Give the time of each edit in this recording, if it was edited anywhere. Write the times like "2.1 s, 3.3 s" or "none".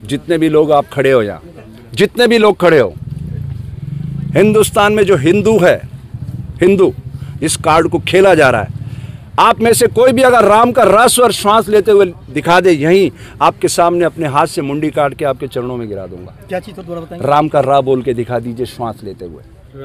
none